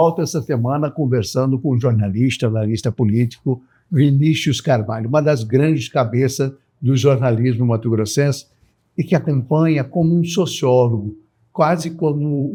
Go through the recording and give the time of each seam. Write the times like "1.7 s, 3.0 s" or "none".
none